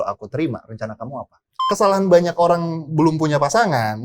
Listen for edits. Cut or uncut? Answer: cut